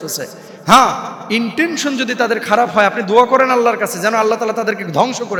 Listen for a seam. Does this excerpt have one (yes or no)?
no